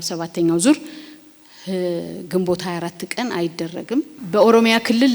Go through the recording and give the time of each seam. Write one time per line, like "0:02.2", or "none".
0:04.2